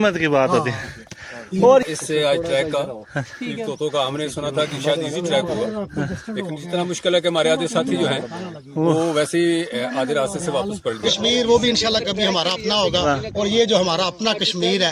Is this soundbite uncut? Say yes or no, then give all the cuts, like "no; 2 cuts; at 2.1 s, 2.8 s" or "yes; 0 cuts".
no; 2 cuts; at 1.8 s, 11.1 s